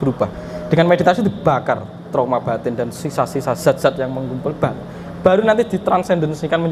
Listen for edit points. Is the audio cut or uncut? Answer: uncut